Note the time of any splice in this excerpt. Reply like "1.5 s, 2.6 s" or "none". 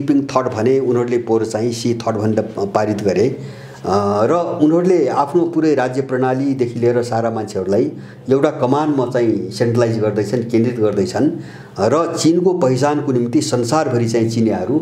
none